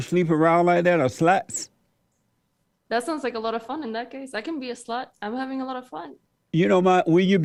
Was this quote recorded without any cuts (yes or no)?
yes